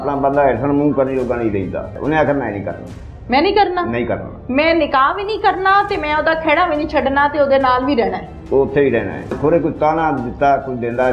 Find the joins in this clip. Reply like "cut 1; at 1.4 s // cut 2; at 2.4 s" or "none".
cut 1; at 1.9 s // cut 2; at 9.4 s

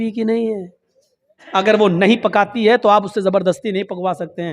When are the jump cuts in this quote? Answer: cut 1; at 1.4 s

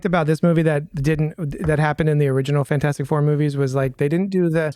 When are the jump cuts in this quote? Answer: none

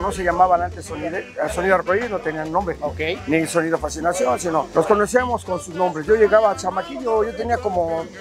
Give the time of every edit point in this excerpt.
none

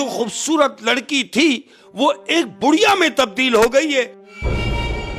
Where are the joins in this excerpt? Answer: cut 1; at 4.2 s

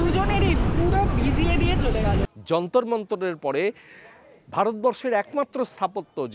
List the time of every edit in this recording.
cut 1; at 2.3 s

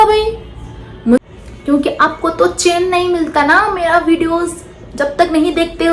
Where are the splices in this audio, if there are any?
cut 1; at 1.2 s

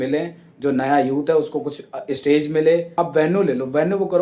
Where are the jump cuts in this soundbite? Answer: cut 1; at 2.9 s

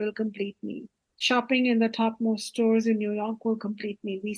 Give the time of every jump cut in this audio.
cut 1; at 1.2 s

